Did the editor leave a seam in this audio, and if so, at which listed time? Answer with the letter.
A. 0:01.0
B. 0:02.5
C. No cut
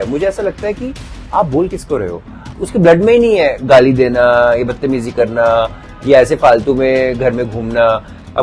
B